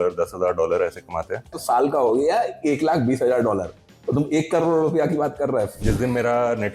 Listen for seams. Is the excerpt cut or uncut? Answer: cut